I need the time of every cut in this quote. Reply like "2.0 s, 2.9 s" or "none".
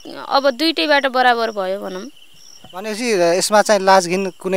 none